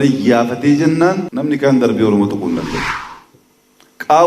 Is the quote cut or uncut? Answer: cut